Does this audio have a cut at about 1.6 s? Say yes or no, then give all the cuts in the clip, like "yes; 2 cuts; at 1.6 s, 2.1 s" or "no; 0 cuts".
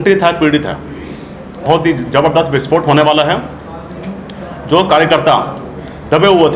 yes; 1 cut; at 1.6 s